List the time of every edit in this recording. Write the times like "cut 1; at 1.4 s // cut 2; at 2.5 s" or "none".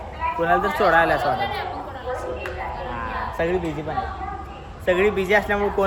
none